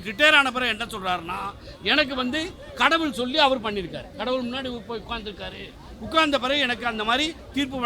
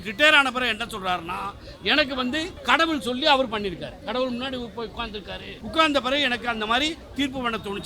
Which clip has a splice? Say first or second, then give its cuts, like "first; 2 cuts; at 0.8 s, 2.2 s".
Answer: second; 2 cuts; at 2.5 s, 5.5 s